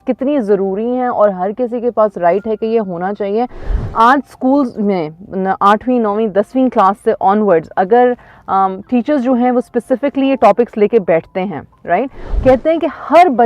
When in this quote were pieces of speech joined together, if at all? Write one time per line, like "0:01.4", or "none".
0:12.2

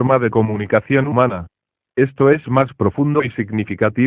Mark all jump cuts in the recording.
0:01.0

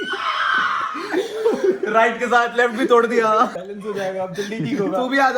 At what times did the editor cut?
0:03.6

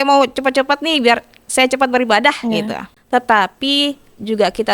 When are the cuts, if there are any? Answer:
0:02.9

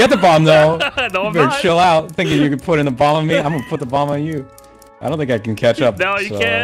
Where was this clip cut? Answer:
none

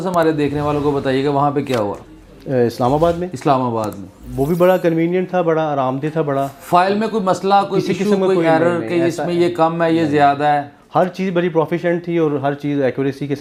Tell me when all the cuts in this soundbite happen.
none

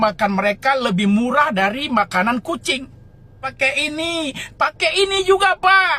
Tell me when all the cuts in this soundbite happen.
0:03.5

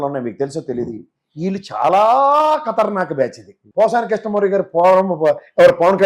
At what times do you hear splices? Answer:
0:03.6

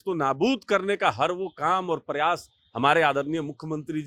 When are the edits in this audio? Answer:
none

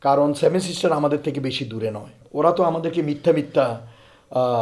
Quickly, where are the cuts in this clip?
0:02.2

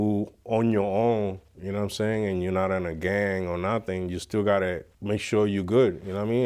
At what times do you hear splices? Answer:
none

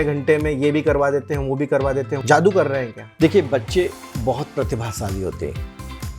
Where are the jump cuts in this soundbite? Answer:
0:02.1
0:03.0

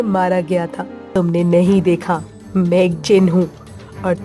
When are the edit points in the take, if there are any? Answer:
0:01.1

